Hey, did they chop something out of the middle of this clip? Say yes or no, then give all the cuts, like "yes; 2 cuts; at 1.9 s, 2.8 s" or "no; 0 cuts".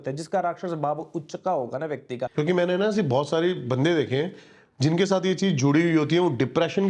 yes; 1 cut; at 2.3 s